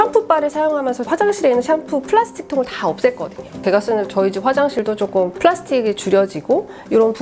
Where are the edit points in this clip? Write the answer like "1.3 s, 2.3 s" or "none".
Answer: 1.1 s, 3.6 s, 5.0 s